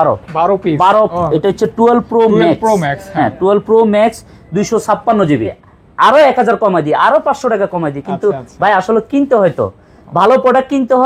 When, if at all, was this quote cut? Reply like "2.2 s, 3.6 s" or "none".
1.1 s, 5.5 s